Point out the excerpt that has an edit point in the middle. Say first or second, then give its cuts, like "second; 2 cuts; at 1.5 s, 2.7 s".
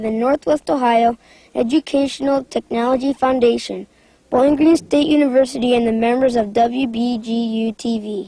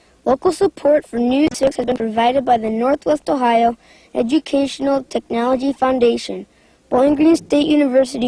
second; 1 cut; at 1.6 s